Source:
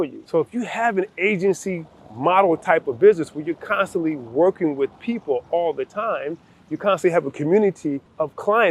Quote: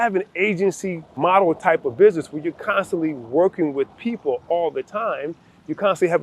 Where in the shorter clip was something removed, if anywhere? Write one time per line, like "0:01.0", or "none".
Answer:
0:01.0